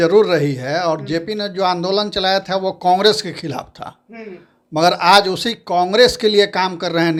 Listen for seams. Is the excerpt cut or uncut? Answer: uncut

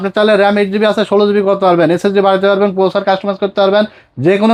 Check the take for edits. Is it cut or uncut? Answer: uncut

